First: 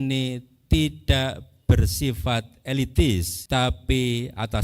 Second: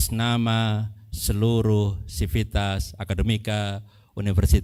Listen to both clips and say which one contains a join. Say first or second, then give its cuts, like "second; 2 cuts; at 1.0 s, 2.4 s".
first; 1 cut; at 3.3 s